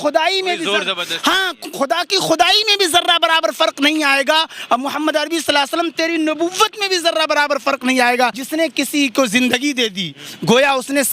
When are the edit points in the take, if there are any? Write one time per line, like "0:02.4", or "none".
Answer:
0:08.4